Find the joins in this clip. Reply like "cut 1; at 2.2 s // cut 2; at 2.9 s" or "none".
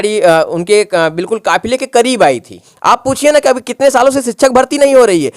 cut 1; at 2.6 s

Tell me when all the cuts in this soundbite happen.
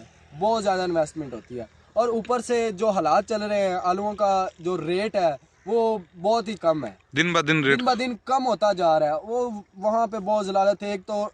none

